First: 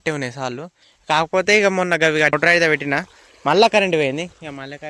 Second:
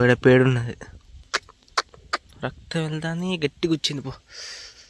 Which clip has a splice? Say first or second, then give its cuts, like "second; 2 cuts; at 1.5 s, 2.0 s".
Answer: first; 1 cut; at 2.3 s